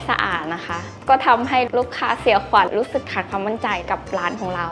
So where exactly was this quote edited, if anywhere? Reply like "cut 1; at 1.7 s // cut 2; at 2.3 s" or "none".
cut 1; at 1.7 s // cut 2; at 2.7 s // cut 3; at 3.8 s